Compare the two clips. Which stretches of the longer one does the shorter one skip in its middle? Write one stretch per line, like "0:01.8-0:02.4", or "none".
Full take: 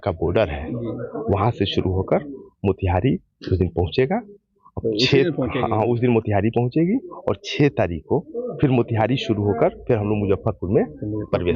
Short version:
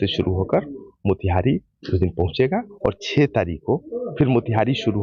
0:04.3-0:07.1